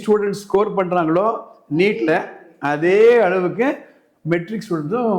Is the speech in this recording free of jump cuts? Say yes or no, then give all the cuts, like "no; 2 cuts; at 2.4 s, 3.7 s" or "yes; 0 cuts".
yes; 0 cuts